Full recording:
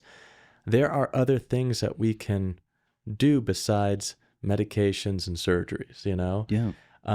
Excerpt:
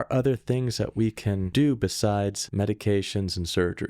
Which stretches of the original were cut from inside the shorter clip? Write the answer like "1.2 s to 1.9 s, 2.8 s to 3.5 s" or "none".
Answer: 2.5 s to 3.1 s, 4.1 s to 4.3 s